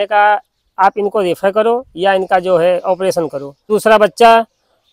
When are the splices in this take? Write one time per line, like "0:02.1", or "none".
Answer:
0:03.7